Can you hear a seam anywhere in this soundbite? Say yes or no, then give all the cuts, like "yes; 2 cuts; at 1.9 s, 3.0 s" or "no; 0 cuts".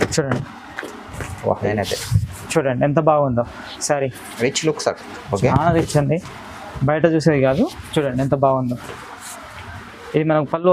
yes; 1 cut; at 1.7 s